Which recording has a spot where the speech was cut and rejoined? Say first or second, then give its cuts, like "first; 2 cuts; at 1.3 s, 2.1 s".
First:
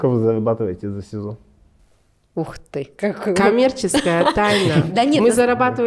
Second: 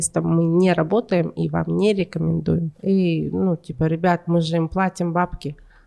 second; 1 cut; at 2.7 s